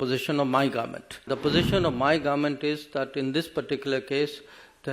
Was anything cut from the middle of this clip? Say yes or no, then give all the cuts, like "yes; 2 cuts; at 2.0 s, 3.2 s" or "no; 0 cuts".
yes; 1 cut; at 1.3 s